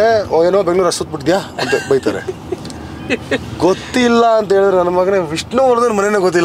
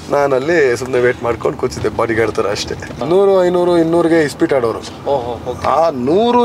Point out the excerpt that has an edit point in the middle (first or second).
second